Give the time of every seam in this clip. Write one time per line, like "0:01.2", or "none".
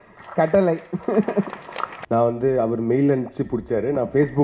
0:01.9